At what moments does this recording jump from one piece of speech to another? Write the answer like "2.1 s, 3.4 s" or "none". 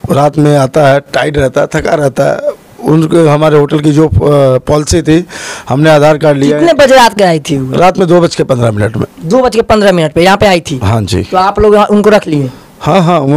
none